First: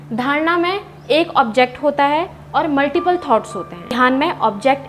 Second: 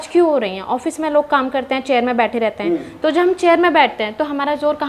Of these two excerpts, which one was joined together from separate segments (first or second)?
first